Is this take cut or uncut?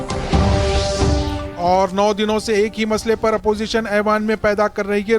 cut